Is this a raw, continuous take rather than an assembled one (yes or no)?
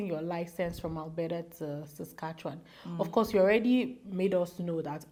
yes